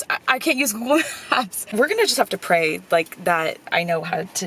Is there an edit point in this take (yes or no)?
yes